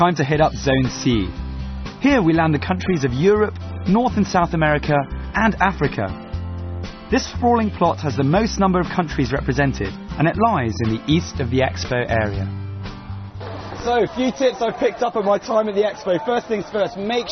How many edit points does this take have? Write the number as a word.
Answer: one